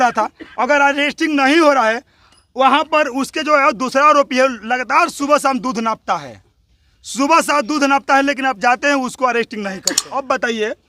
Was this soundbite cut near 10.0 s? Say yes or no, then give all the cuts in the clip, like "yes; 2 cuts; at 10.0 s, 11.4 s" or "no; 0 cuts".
yes; 1 cut; at 10.0 s